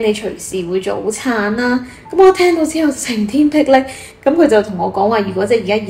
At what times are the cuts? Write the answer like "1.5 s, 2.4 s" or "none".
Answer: 4.0 s